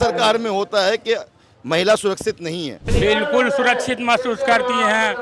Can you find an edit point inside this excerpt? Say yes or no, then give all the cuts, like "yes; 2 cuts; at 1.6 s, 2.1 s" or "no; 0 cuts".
yes; 1 cut; at 2.8 s